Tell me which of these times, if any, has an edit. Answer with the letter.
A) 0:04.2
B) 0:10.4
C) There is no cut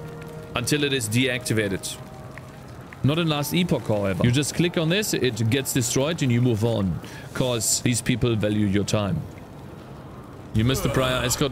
A